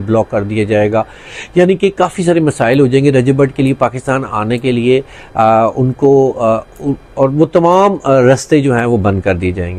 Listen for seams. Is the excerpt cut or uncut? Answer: uncut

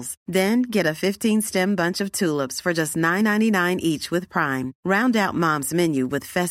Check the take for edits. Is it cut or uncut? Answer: uncut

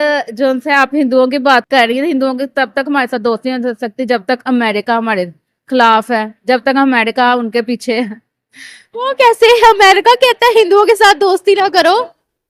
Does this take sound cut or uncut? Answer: uncut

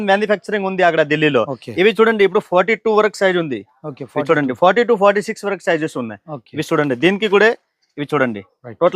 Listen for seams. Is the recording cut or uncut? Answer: uncut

